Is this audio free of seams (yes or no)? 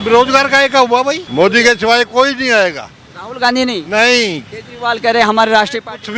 no